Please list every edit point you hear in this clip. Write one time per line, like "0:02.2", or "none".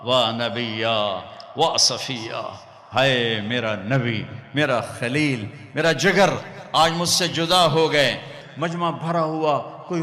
0:08.4